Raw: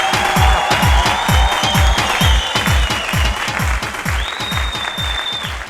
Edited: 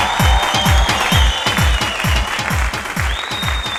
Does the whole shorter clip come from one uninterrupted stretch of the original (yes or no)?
yes